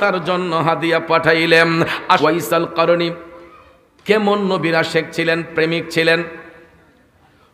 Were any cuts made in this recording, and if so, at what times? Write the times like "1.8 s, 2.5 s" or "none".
2.2 s